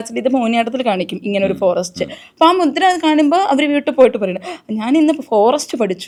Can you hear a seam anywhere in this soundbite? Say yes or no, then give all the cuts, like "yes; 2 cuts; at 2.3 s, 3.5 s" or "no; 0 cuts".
no; 0 cuts